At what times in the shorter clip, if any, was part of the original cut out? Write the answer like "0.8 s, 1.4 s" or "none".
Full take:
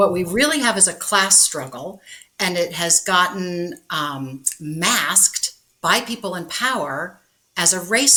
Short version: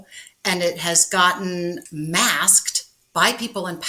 1.9 s